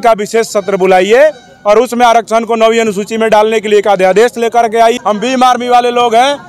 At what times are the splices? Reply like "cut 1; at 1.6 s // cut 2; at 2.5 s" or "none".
cut 1; at 4.9 s